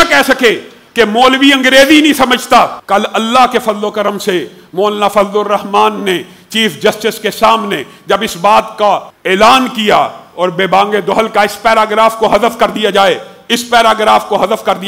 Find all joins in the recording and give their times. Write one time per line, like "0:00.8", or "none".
0:02.8
0:09.1